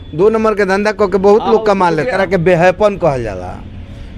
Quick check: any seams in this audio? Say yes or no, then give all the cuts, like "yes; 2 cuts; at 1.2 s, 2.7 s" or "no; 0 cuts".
yes; 1 cut; at 2.1 s